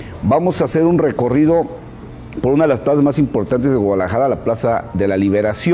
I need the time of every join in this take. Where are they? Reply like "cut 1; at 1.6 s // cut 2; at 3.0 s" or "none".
cut 1; at 2.6 s